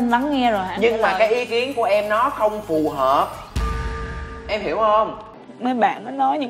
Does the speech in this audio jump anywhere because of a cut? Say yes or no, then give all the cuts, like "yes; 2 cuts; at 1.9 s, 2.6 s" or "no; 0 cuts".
yes; 1 cut; at 5.4 s